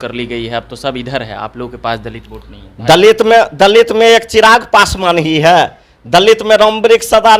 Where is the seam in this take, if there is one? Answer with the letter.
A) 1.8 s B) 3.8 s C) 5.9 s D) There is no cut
D